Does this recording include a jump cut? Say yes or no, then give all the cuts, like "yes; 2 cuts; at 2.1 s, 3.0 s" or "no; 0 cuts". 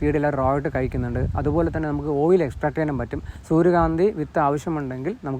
yes; 1 cut; at 3.3 s